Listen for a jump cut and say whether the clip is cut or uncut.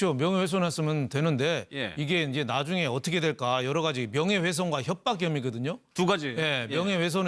cut